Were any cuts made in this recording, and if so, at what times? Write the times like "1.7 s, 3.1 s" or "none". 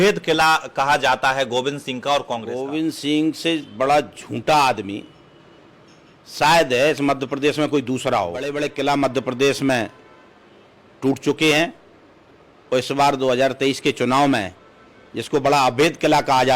2.5 s, 8.6 s